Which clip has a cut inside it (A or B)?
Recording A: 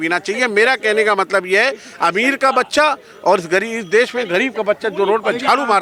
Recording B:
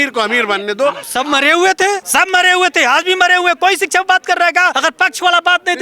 B